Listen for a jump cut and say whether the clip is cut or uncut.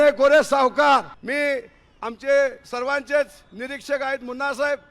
cut